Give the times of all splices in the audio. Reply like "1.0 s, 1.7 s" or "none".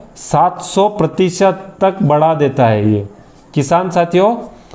none